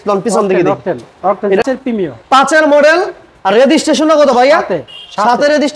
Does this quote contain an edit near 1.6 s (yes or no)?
yes